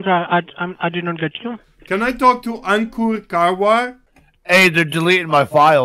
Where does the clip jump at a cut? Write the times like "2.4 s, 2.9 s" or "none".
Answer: 4.0 s